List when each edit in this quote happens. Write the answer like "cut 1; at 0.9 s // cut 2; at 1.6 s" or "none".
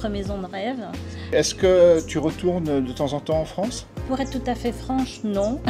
cut 1; at 1.3 s // cut 2; at 4.0 s

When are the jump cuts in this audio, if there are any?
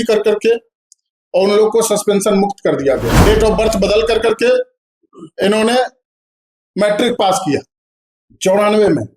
cut 1; at 3.1 s

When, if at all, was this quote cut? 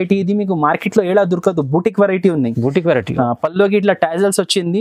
none

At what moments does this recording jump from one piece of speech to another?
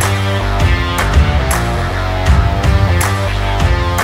none

